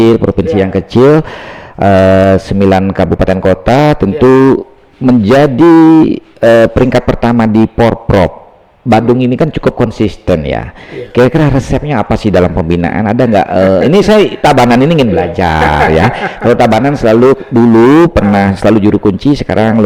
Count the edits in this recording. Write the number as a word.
zero